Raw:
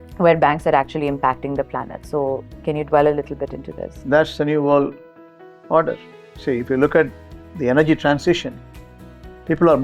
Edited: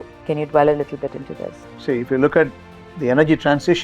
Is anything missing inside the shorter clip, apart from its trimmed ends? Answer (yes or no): yes